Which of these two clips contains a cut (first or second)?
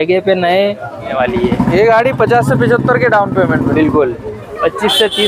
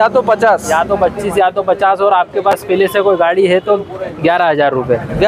first